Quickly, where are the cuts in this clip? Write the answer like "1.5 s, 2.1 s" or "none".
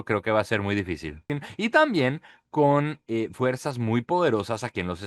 1.4 s